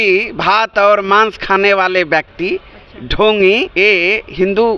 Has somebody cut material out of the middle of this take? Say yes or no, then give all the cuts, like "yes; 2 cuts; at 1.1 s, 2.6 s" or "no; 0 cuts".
no; 0 cuts